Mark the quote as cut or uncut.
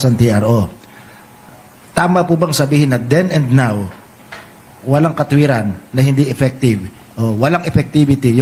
uncut